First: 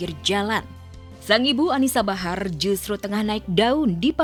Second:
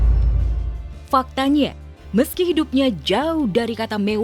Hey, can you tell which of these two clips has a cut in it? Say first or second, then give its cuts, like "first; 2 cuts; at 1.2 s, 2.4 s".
second; 1 cut; at 1.0 s